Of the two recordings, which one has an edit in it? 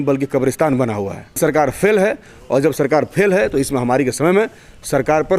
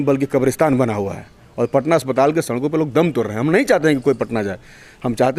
first; 1 cut; at 1.4 s

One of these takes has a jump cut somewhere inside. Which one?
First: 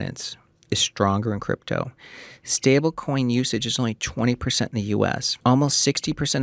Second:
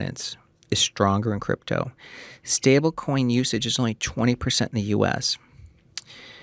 first; 1 cut; at 5.3 s

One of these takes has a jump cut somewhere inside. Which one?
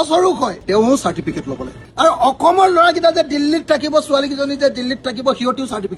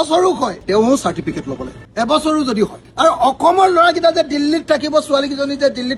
first; 1 cut; at 1.8 s

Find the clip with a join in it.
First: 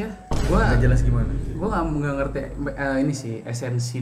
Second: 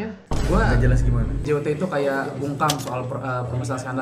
second; 1 cut; at 1.4 s

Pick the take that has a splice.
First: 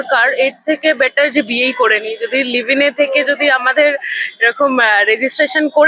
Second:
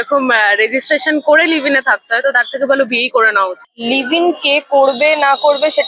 second; 1 cut; at 3.6 s

